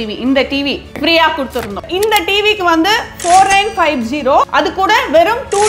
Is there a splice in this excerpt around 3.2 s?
no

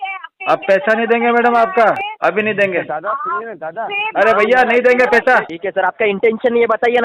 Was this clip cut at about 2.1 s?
yes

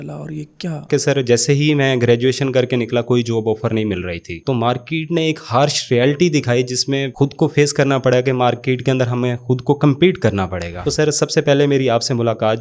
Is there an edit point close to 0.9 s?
yes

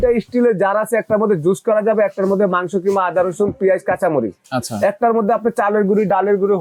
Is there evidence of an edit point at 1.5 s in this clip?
no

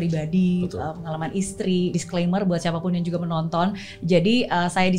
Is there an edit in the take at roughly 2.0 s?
yes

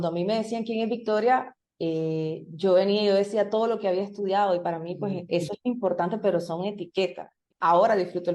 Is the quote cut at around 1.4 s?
no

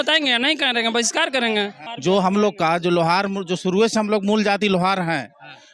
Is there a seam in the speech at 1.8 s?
yes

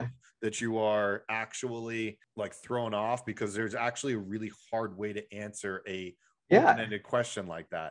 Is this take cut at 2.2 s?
yes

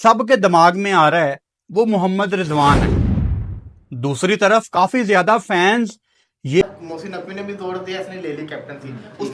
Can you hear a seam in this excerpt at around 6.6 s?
yes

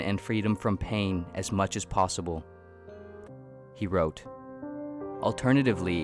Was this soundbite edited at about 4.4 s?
no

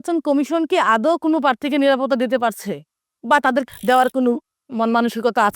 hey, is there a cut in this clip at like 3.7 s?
yes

